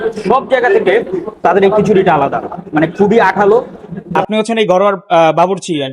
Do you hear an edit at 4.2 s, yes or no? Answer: yes